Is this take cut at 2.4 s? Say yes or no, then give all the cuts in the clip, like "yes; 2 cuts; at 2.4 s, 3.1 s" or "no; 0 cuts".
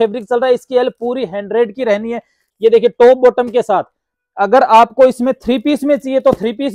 yes; 1 cut; at 2.4 s